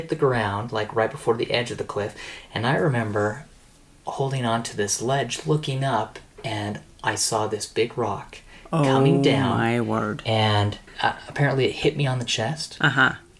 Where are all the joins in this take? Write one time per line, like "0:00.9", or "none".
0:10.8